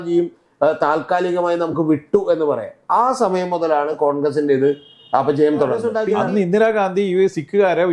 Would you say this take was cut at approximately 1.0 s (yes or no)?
no